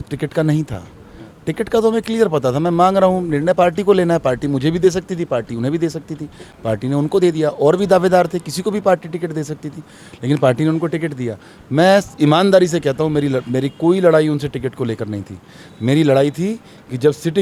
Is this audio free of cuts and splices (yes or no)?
yes